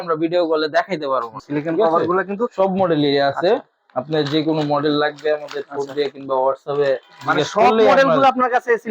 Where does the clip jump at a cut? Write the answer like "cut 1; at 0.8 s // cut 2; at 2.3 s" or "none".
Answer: cut 1; at 1.3 s